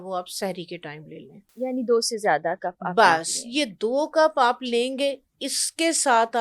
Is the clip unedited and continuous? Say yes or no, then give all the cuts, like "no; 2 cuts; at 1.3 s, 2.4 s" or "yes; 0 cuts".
yes; 0 cuts